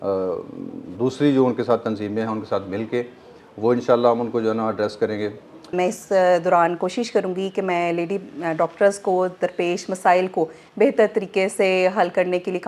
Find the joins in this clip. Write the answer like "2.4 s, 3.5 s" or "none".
5.7 s